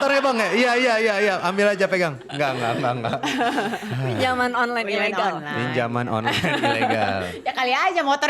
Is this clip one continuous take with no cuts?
yes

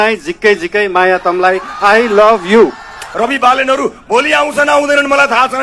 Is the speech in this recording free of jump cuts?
no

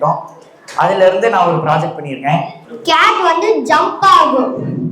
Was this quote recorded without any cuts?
no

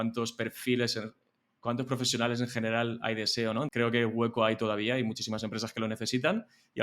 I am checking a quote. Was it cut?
yes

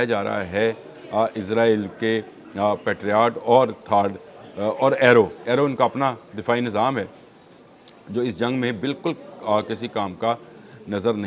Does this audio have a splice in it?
no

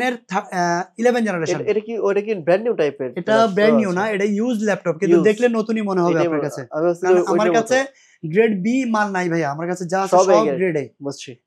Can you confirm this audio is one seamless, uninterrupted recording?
yes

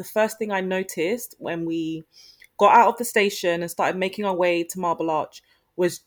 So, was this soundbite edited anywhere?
no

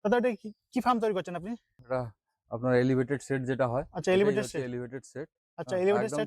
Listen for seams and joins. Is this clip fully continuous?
no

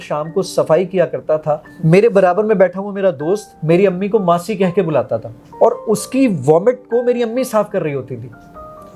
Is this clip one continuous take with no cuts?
no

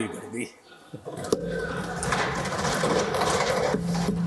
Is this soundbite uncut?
yes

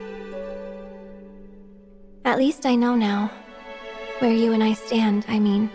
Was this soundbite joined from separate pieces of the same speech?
yes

